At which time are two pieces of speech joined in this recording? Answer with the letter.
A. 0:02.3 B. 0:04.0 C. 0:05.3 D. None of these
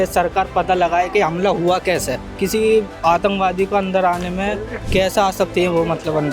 A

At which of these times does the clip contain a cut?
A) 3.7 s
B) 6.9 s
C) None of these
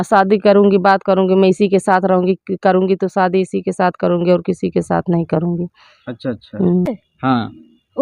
B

